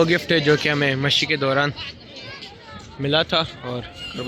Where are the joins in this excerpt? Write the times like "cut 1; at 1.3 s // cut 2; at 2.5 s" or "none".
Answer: none